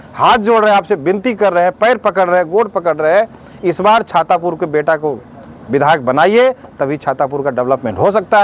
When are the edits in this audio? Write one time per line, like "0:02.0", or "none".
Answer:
none